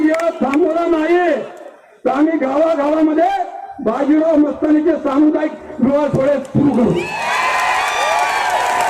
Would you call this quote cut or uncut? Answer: uncut